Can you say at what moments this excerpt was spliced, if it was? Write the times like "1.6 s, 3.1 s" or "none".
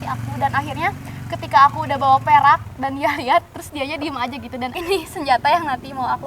4.7 s